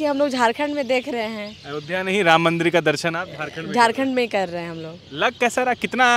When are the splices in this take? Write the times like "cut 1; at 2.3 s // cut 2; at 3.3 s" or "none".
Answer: none